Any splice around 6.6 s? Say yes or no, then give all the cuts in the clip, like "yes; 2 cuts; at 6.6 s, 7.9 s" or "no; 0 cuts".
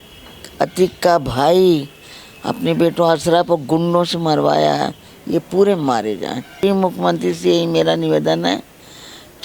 yes; 1 cut; at 6.6 s